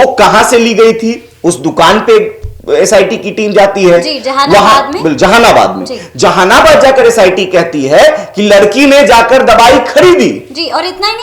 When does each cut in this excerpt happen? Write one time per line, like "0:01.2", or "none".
none